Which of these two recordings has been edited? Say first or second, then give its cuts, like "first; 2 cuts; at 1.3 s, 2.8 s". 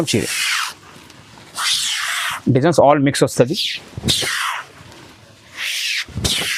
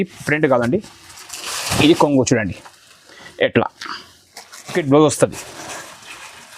second; 1 cut; at 4.7 s